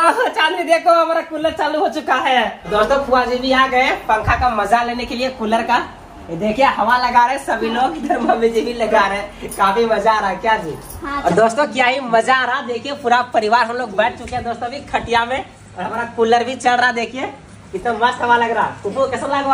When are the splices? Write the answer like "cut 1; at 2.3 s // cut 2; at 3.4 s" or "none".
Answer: cut 1; at 2.7 s // cut 2; at 11.2 s